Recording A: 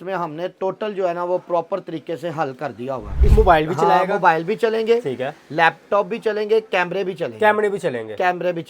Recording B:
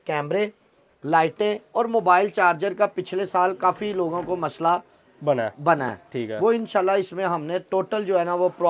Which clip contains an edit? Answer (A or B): A